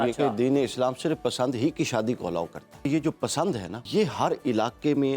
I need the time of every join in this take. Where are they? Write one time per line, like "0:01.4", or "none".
0:02.9
0:03.8